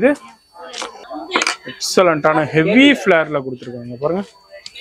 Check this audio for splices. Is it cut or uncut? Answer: cut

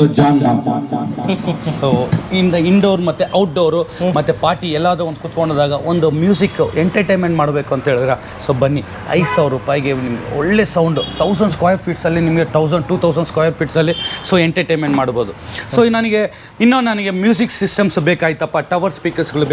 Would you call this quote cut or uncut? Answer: uncut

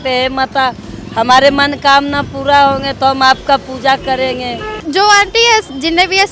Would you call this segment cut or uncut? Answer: cut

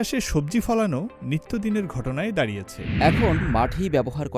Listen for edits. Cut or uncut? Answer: cut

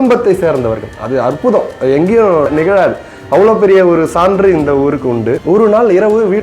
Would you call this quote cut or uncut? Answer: cut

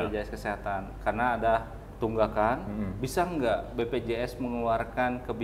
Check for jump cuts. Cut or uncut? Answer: cut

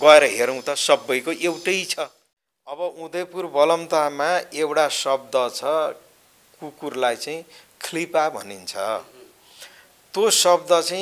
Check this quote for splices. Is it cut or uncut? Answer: cut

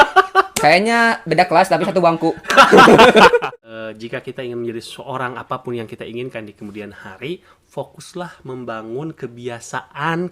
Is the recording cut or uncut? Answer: cut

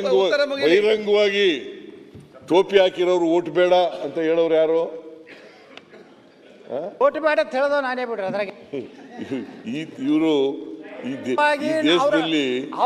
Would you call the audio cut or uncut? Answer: uncut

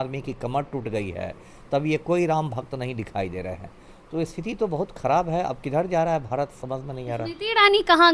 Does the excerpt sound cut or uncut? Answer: uncut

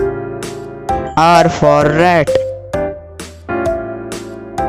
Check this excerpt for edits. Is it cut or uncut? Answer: cut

